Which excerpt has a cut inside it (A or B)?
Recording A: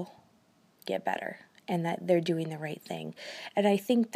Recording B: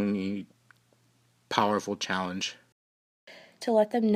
B